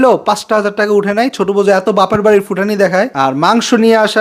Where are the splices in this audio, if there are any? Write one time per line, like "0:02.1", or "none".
0:03.1